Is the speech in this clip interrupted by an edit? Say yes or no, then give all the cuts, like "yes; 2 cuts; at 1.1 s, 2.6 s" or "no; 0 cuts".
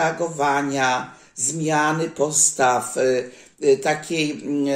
no; 0 cuts